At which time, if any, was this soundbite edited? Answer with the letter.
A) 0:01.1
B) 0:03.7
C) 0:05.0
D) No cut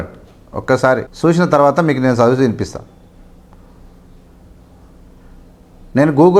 A